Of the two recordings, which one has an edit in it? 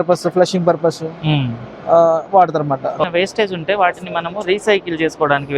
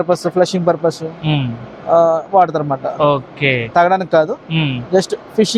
first; 1 cut; at 3.0 s

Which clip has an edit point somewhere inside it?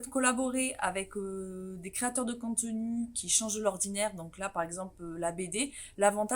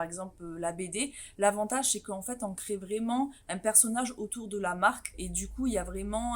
second; 1 cut; at 5.2 s

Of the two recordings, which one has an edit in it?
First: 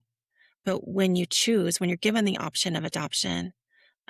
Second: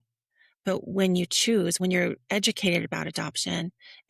second; 1 cut; at 1.8 s

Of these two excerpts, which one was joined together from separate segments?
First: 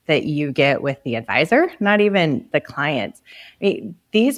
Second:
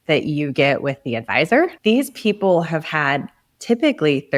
second; 1 cut; at 1.7 s

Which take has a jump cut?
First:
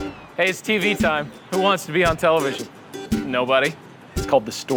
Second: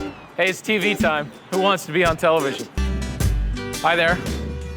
second; 1 cut; at 2.8 s

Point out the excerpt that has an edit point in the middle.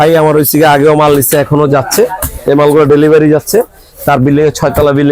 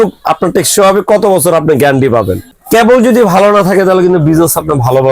second; 1 cut; at 2.5 s

